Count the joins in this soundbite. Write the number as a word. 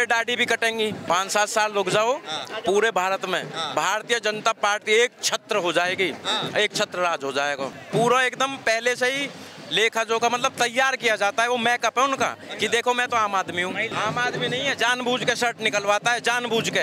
three